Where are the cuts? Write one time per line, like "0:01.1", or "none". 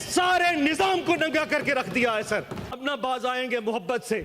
0:02.6